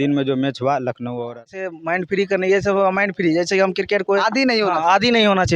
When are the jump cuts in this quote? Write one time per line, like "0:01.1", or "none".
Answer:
0:01.5